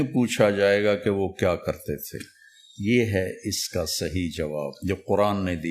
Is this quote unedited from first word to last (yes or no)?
no